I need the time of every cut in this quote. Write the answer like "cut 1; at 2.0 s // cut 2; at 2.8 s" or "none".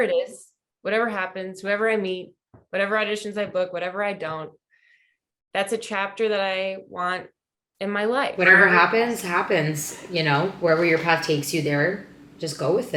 none

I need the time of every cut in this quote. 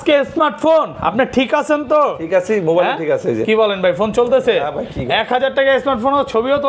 none

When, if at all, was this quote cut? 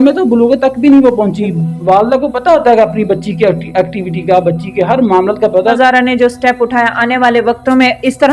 cut 1; at 1.5 s // cut 2; at 5.8 s

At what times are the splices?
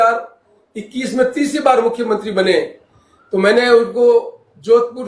none

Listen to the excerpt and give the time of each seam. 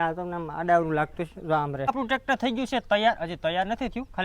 cut 1; at 1.9 s

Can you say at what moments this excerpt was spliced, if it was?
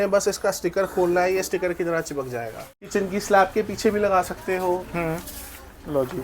cut 1; at 2.8 s

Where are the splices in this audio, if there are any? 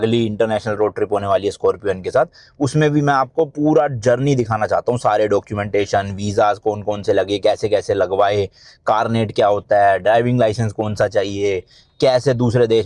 none

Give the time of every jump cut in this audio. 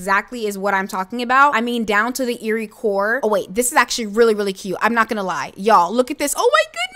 cut 1; at 3.2 s

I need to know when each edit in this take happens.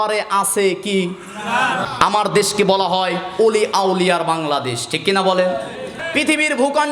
cut 1; at 1.8 s // cut 2; at 5.9 s

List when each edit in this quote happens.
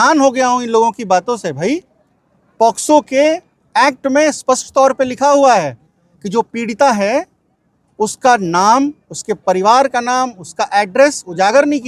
none

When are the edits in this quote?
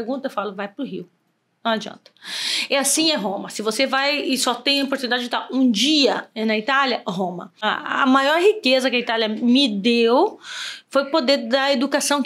cut 1; at 7.6 s

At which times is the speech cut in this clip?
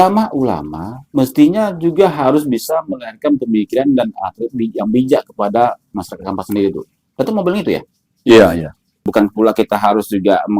cut 1; at 9.1 s

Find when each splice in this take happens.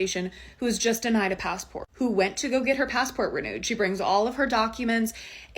none

